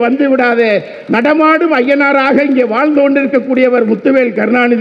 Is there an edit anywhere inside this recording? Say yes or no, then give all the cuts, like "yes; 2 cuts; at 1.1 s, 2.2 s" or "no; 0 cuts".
no; 0 cuts